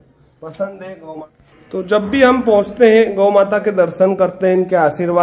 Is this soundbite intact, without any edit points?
no; 1 cut; at 1.2 s

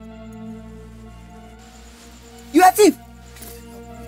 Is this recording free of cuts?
no; 1 cut; at 3.0 s

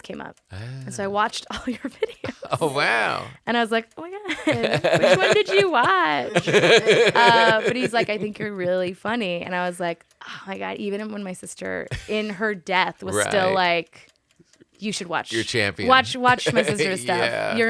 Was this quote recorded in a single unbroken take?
yes; 0 cuts

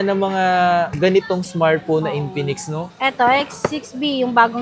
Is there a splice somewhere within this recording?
yes; 1 cut; at 2.9 s

